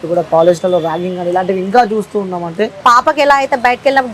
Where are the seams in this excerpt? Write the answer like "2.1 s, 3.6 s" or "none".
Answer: 2.7 s